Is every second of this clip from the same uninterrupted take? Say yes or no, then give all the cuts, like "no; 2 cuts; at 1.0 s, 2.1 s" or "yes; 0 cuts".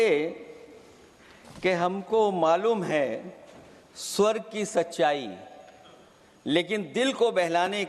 yes; 0 cuts